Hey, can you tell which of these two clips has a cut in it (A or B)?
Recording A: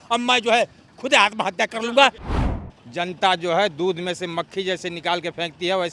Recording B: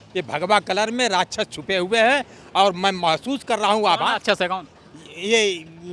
A